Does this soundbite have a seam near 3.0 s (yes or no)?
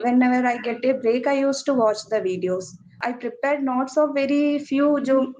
yes